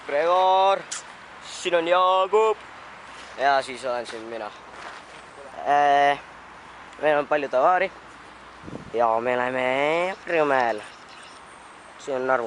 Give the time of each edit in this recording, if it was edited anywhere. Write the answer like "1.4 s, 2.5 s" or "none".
5.1 s

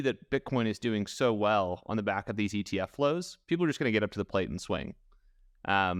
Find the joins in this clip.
none

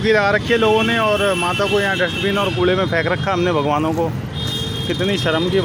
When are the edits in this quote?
none

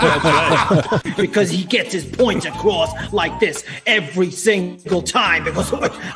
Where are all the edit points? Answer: 1.0 s

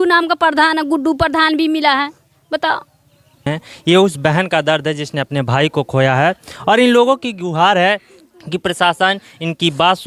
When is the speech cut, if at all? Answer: 3.5 s

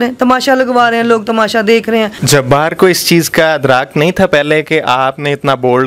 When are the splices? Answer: 2.2 s

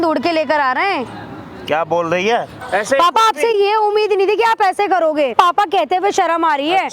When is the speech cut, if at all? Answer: 2.6 s, 5.3 s

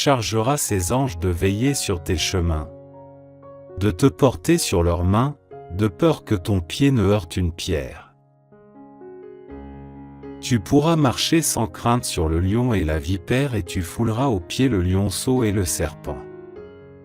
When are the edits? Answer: 8.1 s, 10.4 s, 16.1 s

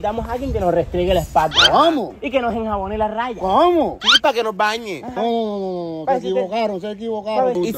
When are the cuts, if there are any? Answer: none

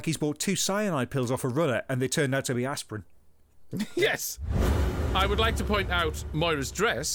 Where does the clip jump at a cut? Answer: 4.7 s

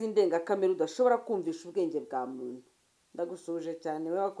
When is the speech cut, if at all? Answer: none

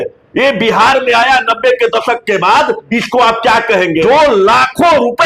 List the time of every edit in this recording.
4.0 s

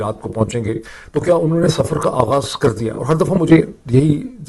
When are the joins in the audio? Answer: 0.9 s

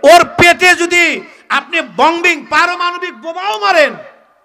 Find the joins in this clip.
none

